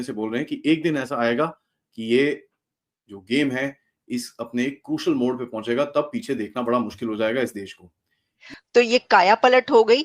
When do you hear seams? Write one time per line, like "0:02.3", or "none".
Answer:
0:08.4